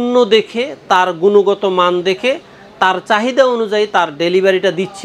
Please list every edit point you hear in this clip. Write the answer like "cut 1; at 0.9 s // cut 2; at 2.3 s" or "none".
none

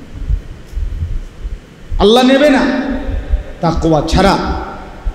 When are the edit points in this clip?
none

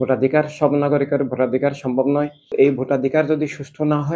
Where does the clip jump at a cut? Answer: cut 1; at 2.5 s

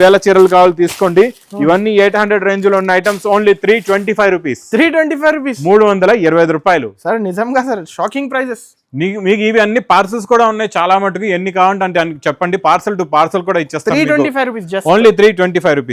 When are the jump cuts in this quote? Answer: none

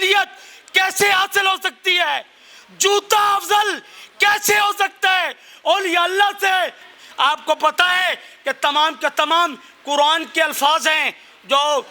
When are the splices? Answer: cut 1; at 6.9 s

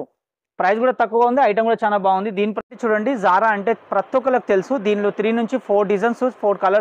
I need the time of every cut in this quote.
cut 1; at 2.6 s

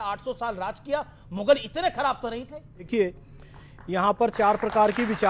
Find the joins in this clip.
cut 1; at 2.9 s

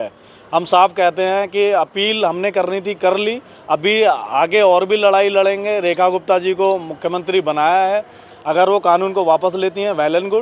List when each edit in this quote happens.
none

